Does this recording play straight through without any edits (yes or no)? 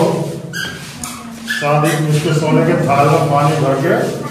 yes